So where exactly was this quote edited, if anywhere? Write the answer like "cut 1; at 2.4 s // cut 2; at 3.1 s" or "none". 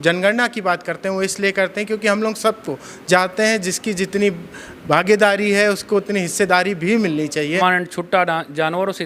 cut 1; at 7.6 s